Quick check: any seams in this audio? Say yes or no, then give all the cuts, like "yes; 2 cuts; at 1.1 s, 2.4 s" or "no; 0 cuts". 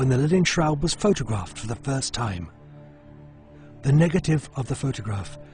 no; 0 cuts